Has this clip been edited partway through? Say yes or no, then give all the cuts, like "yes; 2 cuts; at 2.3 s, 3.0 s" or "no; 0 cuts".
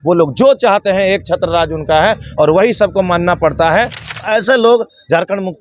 yes; 1 cut; at 4.3 s